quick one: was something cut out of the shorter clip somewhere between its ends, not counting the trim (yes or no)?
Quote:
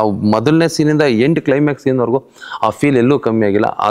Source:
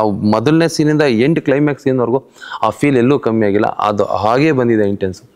no